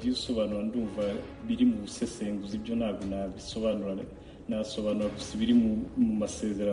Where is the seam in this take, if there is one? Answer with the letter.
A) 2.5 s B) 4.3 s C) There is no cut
C